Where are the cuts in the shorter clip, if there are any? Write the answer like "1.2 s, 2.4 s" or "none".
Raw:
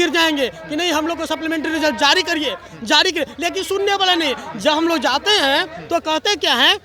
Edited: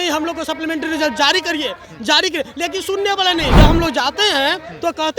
3.5 s